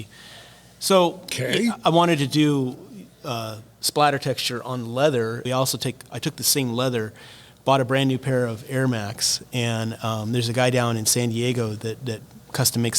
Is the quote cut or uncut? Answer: cut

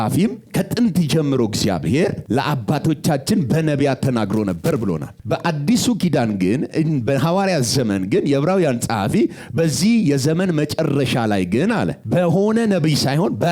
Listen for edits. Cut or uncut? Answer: cut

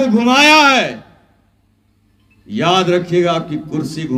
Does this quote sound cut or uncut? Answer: uncut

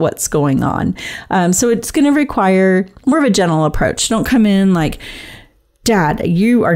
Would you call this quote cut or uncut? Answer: uncut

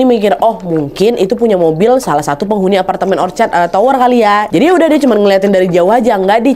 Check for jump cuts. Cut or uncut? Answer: cut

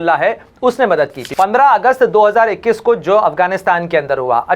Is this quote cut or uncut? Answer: cut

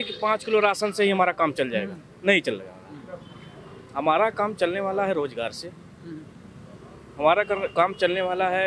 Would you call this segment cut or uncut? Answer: uncut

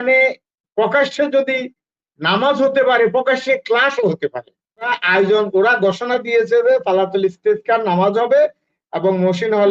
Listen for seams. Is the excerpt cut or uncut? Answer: cut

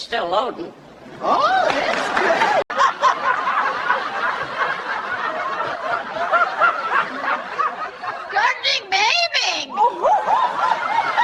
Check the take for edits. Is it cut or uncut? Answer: uncut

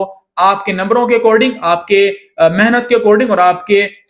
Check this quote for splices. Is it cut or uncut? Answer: uncut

